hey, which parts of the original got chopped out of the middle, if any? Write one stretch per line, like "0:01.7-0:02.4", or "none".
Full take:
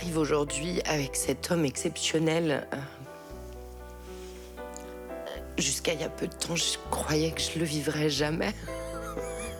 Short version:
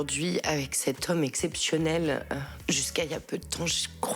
0:03.0-0:05.4

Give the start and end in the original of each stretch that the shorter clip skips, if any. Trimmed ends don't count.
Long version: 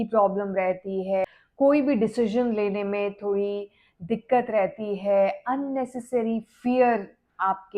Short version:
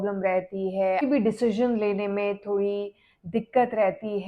0:01.4-0:01.8

